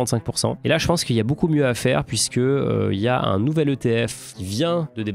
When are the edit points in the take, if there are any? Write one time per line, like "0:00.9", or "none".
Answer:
none